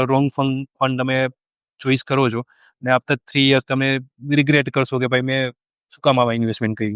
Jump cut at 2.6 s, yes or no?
no